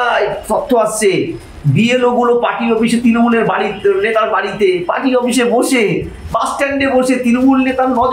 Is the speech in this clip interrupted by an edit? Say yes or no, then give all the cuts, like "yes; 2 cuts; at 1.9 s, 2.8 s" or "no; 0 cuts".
no; 0 cuts